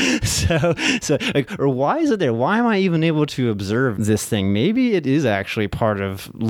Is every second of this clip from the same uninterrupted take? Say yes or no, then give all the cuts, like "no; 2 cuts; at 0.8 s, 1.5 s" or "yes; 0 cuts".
no; 1 cut; at 4.0 s